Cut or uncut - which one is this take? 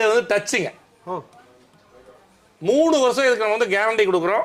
uncut